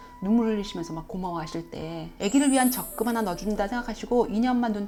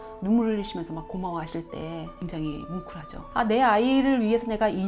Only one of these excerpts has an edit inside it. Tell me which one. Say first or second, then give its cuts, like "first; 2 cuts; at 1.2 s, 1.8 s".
second; 2 cuts; at 2.1 s, 3.2 s